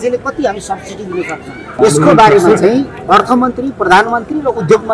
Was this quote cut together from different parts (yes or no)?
yes